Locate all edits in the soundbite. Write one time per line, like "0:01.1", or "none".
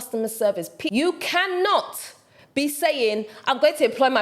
0:00.9

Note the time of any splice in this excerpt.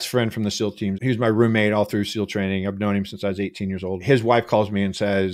0:01.0
0:04.0

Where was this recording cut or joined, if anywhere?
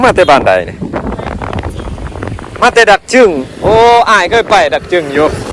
none

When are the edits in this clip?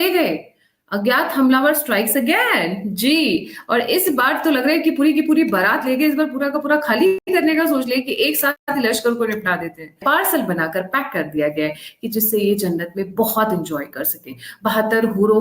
0:07.2
0:08.6
0:10.0

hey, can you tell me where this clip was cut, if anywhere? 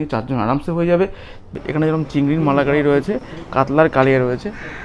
0:01.4

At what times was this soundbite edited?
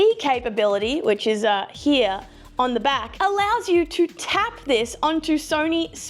none

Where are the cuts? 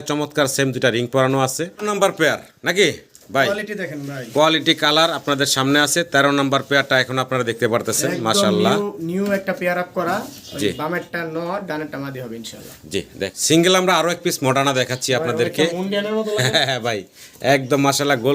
0:01.7
0:13.4

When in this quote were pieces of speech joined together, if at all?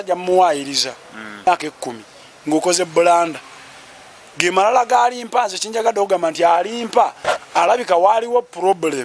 0:01.5

